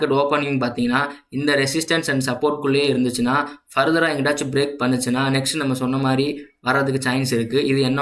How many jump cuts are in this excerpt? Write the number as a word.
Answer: zero